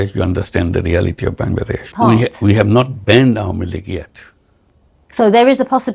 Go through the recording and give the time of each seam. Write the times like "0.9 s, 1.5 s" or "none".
1.9 s